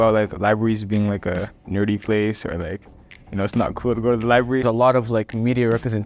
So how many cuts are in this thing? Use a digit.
2